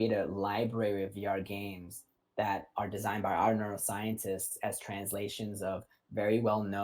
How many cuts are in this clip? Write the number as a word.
zero